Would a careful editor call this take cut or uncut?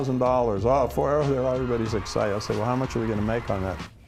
uncut